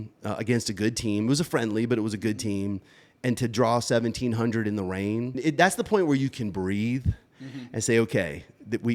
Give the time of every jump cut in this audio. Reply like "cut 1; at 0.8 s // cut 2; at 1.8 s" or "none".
cut 1; at 5.3 s